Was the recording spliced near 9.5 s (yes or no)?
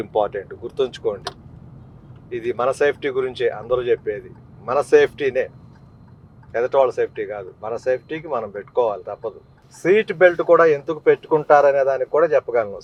no